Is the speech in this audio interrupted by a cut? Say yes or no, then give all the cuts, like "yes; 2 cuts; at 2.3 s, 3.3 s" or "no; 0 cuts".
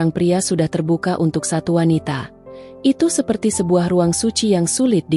no; 0 cuts